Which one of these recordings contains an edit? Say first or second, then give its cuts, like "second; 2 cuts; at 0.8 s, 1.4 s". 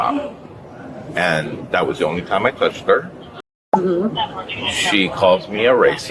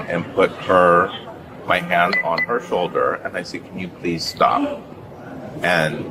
first; 1 cut; at 3.5 s